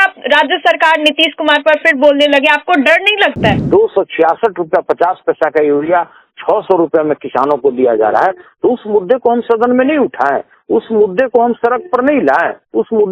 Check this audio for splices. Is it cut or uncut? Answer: cut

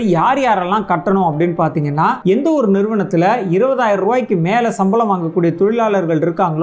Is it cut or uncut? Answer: cut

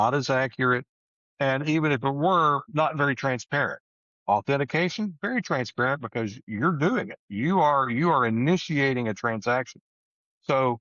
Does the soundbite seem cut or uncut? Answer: cut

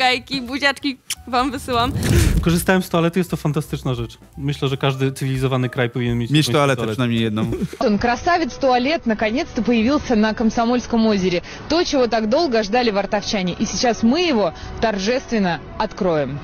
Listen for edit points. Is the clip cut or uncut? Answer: cut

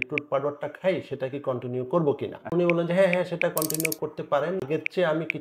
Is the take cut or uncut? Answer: cut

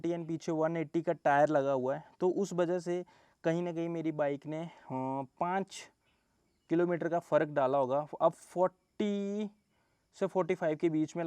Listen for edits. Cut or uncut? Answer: uncut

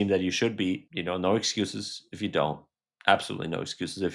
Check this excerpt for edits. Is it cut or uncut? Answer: cut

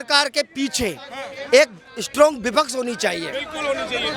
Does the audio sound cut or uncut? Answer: uncut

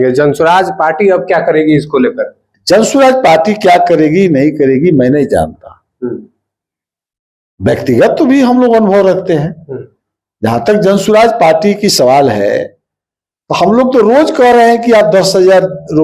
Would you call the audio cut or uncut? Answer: uncut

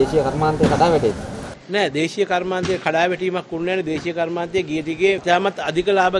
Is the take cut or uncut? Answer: cut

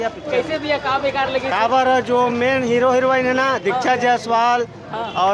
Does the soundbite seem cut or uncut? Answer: uncut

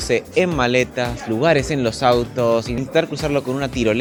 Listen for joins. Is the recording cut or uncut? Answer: uncut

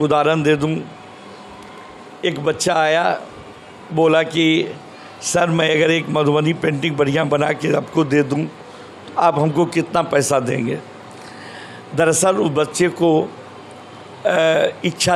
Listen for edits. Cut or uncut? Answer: uncut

